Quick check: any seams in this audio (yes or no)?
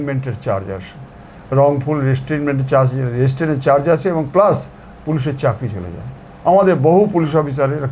no